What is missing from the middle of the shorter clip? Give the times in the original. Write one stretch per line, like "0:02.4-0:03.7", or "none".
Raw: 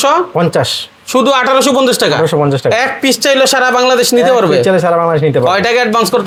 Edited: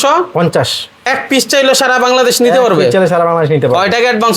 0:01.1-0:02.8